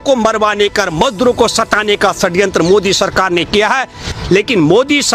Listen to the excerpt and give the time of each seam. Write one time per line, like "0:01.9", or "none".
0:04.1

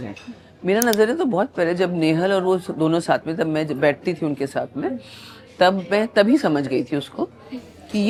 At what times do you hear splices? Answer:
none

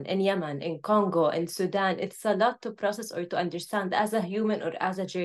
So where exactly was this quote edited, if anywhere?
none

